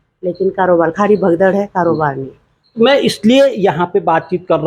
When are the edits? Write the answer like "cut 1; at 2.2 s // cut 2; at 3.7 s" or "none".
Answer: none